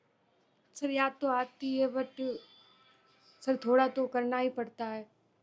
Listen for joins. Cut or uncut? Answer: uncut